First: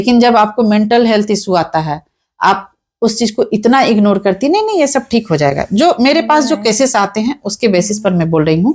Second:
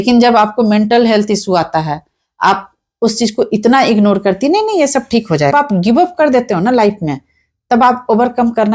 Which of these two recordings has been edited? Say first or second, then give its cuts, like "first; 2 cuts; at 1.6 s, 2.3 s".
second; 1 cut; at 5.5 s